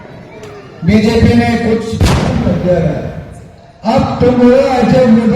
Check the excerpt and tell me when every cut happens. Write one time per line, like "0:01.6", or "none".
0:02.4